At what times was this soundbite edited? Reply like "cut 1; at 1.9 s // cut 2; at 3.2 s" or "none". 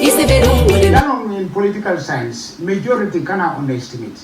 cut 1; at 1.0 s